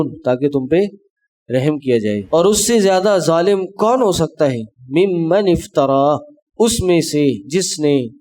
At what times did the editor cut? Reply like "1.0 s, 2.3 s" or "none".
2.2 s